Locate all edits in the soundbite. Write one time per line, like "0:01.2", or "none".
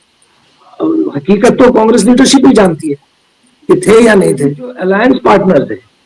0:04.8

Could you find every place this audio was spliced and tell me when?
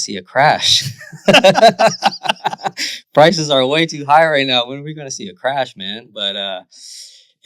none

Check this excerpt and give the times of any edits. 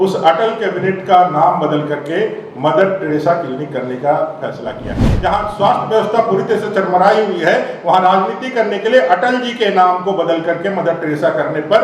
0:05.1

